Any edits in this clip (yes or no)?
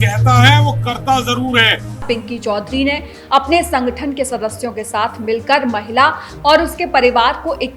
yes